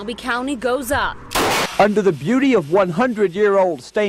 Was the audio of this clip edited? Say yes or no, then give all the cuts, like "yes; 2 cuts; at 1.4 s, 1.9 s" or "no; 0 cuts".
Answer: yes; 1 cut; at 1.7 s